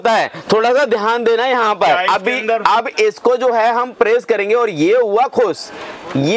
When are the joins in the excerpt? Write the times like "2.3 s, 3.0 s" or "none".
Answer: 2.0 s